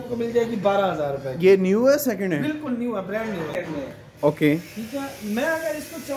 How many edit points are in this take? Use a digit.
1